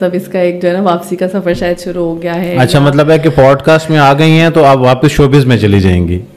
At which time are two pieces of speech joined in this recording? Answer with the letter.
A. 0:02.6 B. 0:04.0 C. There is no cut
C